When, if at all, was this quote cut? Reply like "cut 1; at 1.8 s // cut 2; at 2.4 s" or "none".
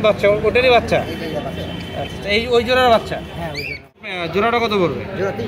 cut 1; at 4.1 s